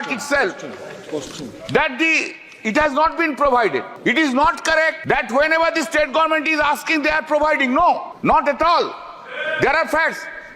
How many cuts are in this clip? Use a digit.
3